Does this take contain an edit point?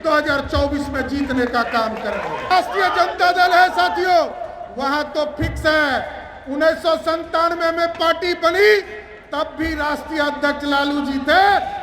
yes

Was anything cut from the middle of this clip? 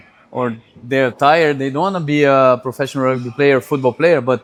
no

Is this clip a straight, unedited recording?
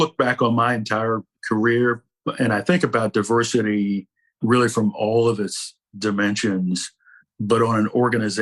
no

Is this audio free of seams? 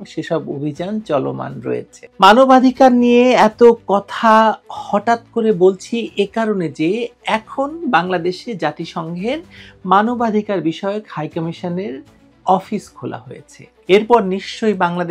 no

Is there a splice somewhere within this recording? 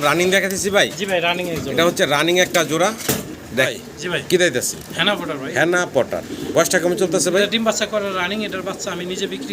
yes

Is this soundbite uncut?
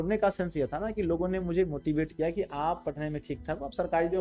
yes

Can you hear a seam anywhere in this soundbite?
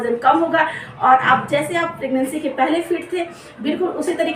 no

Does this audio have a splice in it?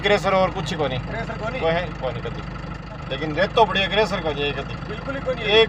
yes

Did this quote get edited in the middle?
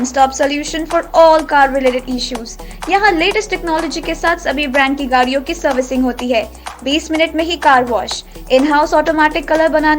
no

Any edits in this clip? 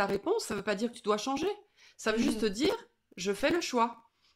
no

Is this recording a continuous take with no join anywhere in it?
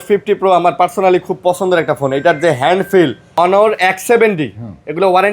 no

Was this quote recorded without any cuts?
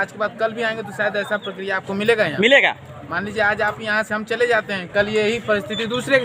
yes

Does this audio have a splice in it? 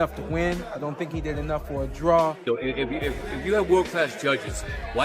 yes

